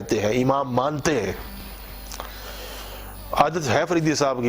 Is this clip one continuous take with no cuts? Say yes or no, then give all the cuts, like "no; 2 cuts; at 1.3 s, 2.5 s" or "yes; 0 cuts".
yes; 0 cuts